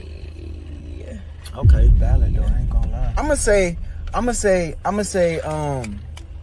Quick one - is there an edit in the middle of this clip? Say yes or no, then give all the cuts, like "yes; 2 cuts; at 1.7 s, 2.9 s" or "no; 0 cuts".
no; 0 cuts